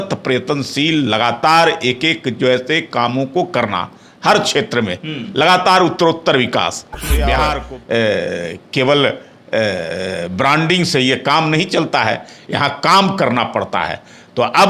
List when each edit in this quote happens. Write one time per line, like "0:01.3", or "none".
0:07.4